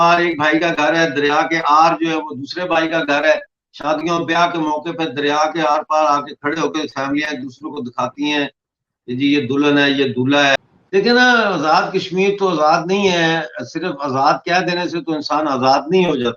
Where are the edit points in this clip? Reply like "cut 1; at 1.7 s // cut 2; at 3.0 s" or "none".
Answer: cut 1; at 10.6 s